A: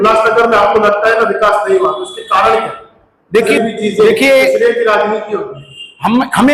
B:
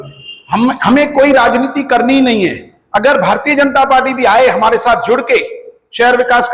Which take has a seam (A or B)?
A